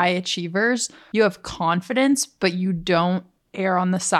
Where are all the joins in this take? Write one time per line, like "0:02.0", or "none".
0:01.0